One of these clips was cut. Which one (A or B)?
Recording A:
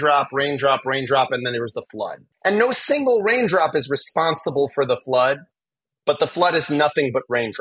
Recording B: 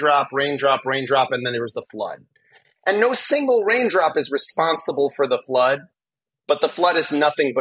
A